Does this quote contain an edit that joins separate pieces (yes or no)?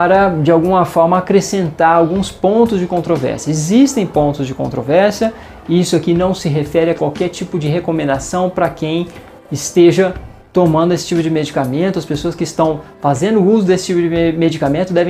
no